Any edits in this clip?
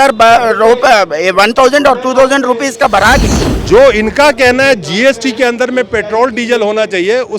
yes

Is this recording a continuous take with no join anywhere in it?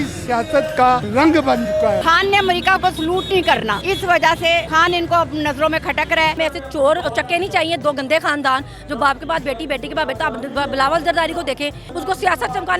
no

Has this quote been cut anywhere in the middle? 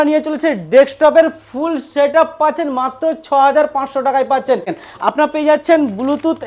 yes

